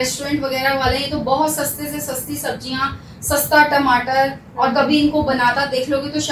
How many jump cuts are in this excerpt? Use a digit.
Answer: 0